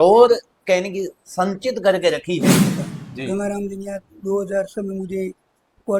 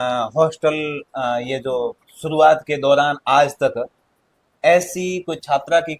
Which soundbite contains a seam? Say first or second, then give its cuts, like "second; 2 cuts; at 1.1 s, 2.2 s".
first; 1 cut; at 2.8 s